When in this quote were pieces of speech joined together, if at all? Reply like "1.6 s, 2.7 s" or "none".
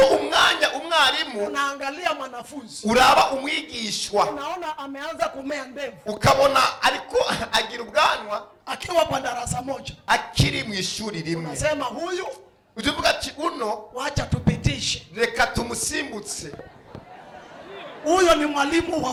none